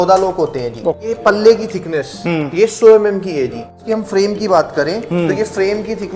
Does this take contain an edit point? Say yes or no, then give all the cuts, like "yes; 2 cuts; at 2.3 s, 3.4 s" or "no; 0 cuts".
yes; 2 cuts; at 1.1 s, 3.8 s